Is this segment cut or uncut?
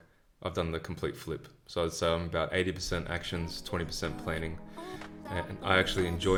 uncut